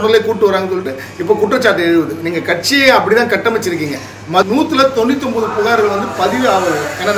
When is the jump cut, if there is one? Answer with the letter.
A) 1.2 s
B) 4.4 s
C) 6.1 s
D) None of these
B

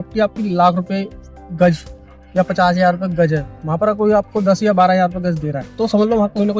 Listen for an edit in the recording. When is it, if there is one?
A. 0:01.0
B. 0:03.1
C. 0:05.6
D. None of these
C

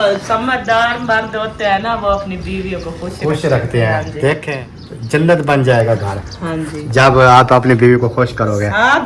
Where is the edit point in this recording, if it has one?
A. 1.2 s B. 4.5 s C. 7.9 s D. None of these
B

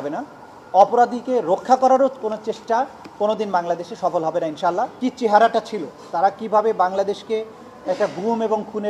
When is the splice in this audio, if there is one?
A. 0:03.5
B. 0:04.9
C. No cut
B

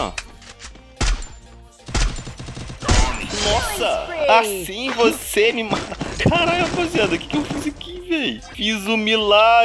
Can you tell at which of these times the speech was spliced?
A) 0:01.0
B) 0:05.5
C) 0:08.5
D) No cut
C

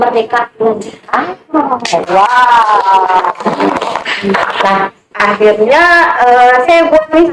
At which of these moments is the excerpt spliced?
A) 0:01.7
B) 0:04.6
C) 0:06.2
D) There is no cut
B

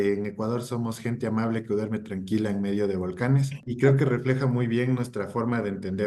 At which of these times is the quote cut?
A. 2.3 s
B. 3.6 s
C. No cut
B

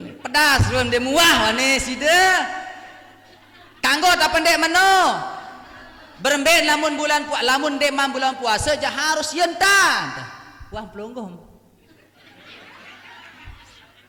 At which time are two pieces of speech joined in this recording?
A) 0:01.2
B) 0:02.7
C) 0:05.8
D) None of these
D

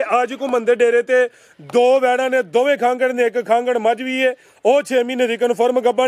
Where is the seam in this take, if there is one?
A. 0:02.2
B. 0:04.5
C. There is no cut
C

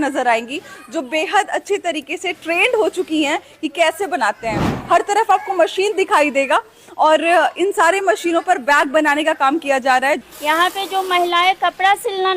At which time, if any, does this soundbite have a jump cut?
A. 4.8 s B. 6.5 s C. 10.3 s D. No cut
C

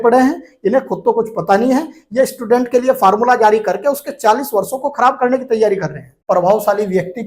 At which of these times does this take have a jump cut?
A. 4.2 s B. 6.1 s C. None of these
B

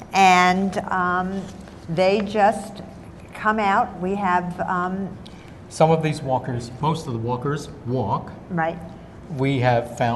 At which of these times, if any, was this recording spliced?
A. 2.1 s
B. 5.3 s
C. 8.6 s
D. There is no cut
C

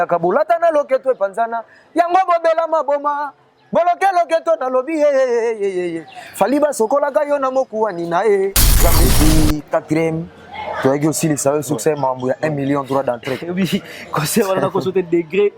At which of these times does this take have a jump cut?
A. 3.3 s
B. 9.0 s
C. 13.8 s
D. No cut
B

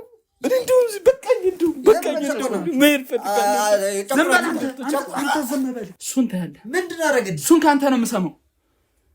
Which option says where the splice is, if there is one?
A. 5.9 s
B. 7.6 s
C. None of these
A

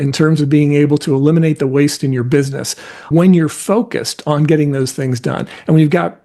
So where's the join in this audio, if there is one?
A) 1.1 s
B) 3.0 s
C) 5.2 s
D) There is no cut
B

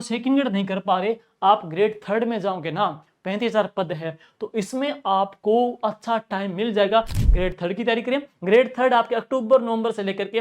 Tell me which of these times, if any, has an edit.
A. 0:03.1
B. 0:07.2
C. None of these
B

